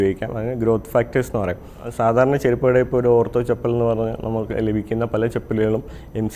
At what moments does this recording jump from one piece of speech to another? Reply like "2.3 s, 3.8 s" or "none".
1.8 s